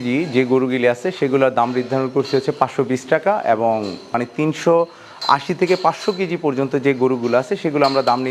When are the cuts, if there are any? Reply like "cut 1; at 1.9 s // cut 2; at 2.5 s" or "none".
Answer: none